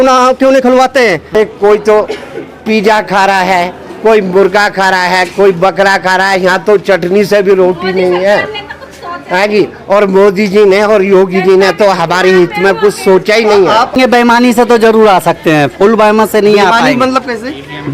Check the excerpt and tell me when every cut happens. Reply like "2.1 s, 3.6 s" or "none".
1.3 s, 13.9 s